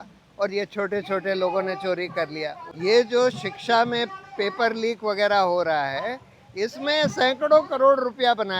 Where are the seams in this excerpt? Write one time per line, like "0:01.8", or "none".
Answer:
0:02.6